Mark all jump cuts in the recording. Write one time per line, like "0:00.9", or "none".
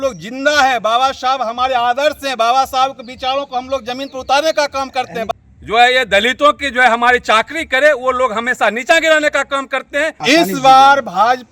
0:05.2
0:10.2

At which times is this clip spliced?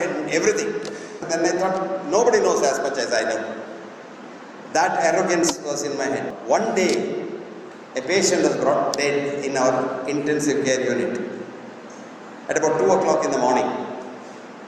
0:01.2
0:06.3

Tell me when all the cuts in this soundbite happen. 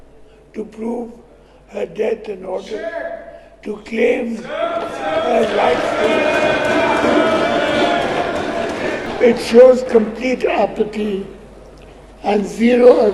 0:09.1

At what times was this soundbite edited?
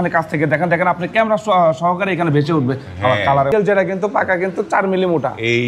0:03.5

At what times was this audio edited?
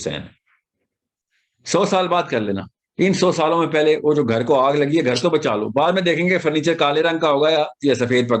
0:01.1

